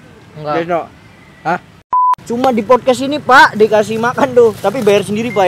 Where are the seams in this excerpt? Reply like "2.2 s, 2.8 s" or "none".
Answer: 2.3 s

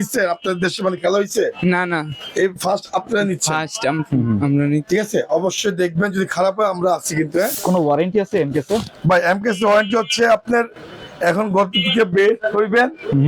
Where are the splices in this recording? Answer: 7.5 s

